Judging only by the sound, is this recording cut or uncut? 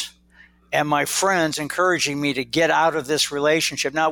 uncut